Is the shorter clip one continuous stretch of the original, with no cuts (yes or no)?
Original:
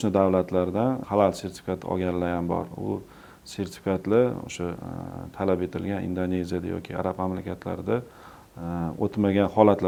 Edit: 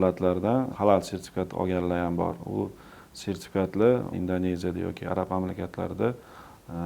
no